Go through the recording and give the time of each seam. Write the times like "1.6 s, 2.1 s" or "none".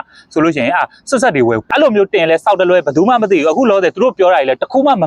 1.6 s

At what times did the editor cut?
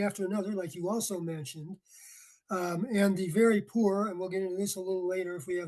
none

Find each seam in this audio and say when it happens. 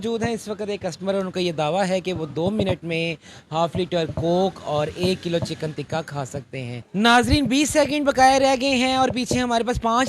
6.9 s

